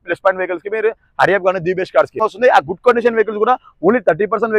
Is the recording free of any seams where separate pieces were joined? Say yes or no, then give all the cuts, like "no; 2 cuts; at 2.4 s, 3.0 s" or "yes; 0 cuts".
no; 1 cut; at 2.1 s